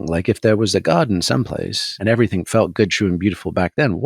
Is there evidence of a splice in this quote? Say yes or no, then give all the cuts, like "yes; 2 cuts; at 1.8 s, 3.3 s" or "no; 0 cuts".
yes; 1 cut; at 2.0 s